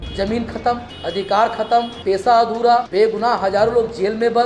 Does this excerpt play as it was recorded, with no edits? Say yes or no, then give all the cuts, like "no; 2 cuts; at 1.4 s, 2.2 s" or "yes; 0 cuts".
no; 3 cuts; at 0.9 s, 1.9 s, 2.9 s